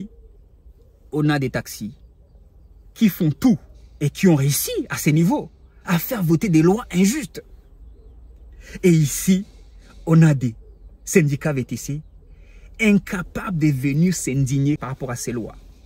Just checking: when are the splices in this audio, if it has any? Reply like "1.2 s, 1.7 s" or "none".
14.8 s

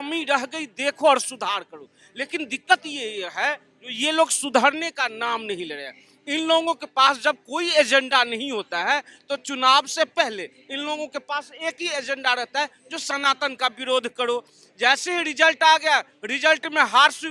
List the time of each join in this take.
none

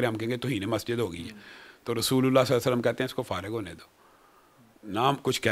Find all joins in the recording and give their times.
none

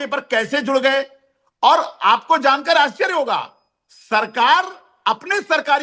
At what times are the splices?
none

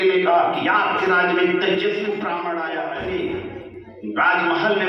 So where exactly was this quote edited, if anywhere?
2.7 s

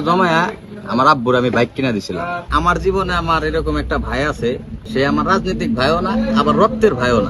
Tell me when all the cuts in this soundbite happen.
2.5 s, 4.9 s

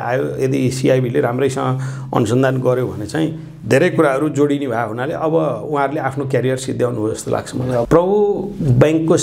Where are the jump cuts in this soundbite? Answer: 7.9 s

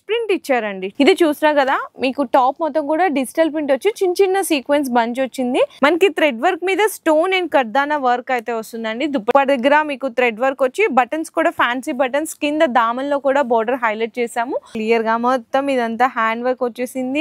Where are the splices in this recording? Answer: 0.9 s, 5.8 s, 9.3 s, 14.8 s

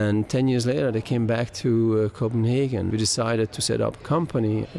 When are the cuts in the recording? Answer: 2.9 s

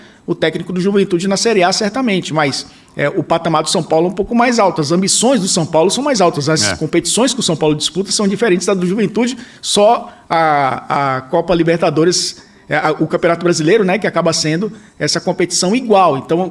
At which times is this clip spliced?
none

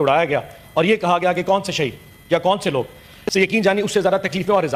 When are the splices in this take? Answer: none

